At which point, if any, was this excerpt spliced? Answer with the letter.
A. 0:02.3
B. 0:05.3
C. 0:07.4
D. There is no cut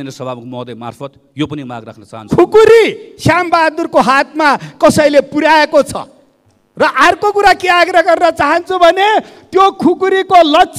A